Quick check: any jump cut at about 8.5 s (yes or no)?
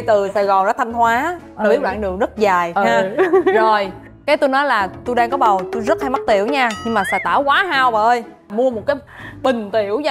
yes